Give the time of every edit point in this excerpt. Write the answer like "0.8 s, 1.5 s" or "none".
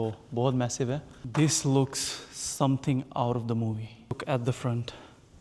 1.2 s, 4.2 s